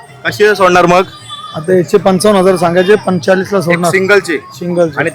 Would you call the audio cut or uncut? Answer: uncut